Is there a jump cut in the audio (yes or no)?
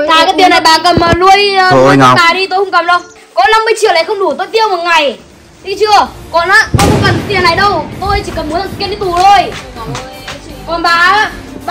yes